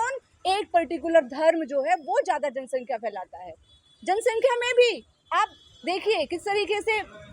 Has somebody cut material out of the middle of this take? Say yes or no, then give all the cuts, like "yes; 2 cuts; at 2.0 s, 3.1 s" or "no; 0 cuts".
no; 0 cuts